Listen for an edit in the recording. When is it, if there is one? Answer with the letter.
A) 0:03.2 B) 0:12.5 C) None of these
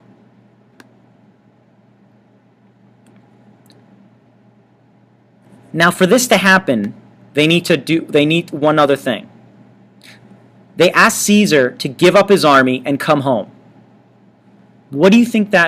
A